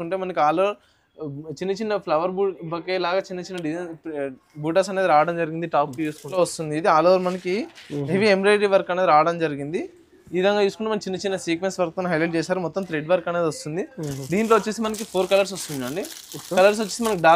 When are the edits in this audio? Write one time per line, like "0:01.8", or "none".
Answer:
0:06.4